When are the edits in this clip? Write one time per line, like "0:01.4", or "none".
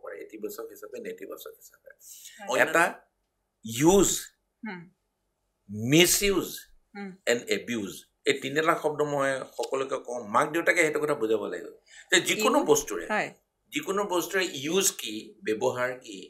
0:02.5